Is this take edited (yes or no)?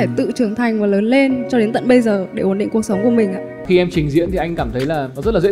yes